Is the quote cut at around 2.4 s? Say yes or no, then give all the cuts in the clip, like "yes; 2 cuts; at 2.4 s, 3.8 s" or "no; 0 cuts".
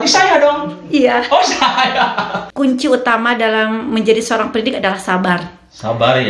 yes; 1 cut; at 2.4 s